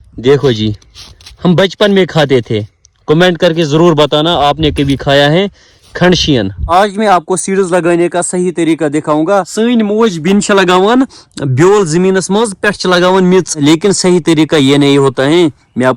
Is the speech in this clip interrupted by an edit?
yes; 1 cut; at 6.7 s

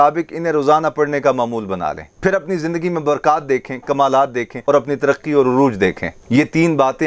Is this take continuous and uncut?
no; 2 cuts; at 4.5 s, 6.1 s

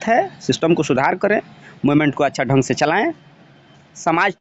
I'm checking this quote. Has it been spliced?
no; 0 cuts

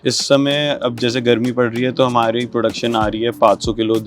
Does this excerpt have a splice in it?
no; 0 cuts

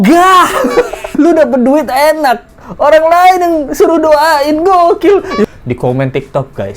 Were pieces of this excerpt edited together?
yes; 2 cuts; at 1.1 s, 5.4 s

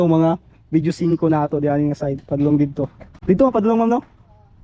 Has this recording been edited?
no; 0 cuts

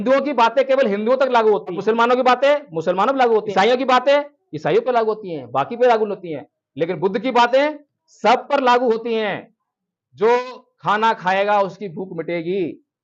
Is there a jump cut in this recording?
yes; 2 cuts; at 1.8 s, 3.5 s

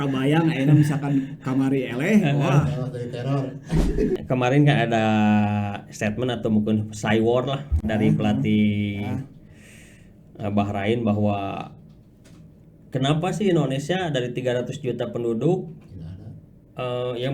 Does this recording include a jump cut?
yes; 1 cut; at 4.2 s

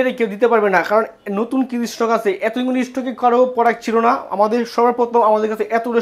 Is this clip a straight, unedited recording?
yes; 0 cuts

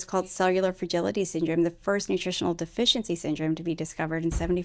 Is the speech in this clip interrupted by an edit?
no; 0 cuts

